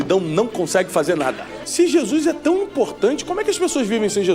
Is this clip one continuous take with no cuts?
no; 1 cut; at 1.5 s

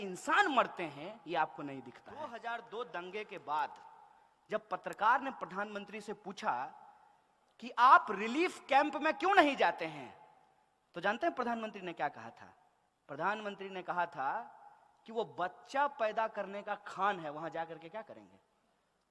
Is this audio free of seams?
no; 1 cut; at 2.2 s

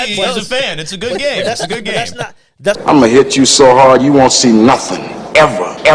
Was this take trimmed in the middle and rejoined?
yes; 1 cut; at 2.8 s

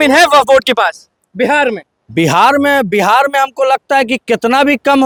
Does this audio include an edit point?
no; 0 cuts

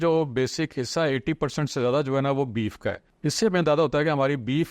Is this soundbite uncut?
no; 1 cut; at 3.1 s

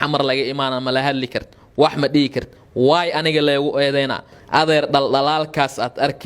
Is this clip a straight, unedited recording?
no; 1 cut; at 4.3 s

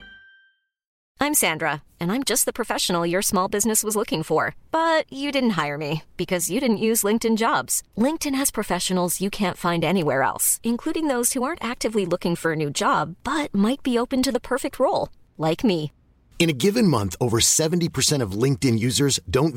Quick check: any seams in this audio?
yes; 1 cut; at 1.0 s

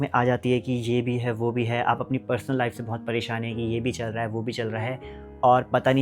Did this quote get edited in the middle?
no; 0 cuts

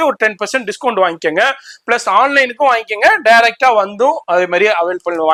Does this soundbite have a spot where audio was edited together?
no; 0 cuts

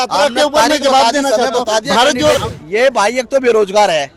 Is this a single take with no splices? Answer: no; 1 cut; at 2.4 s

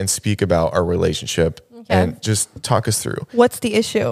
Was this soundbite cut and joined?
no; 0 cuts

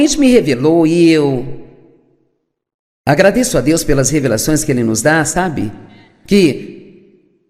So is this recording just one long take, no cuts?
yes; 0 cuts

